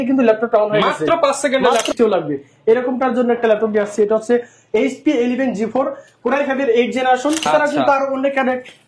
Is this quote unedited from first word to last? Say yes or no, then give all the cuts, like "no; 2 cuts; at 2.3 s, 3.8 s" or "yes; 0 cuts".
no; 2 cuts; at 1.9 s, 7.5 s